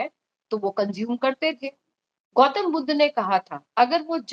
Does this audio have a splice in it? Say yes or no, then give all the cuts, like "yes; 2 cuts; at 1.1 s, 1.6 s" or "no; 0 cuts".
no; 0 cuts